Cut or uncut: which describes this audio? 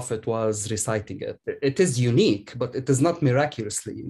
cut